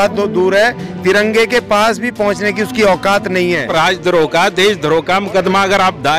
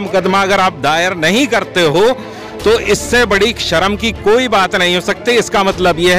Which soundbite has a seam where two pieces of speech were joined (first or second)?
first